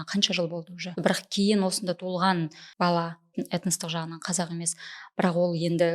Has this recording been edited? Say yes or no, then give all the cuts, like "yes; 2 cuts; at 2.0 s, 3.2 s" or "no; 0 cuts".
yes; 3 cuts; at 0.9 s, 2.6 s, 3.3 s